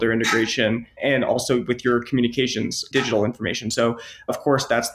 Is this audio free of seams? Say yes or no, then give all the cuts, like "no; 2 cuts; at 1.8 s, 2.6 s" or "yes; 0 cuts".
no; 2 cuts; at 1.0 s, 2.8 s